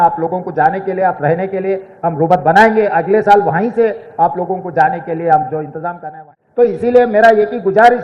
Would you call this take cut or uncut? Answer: cut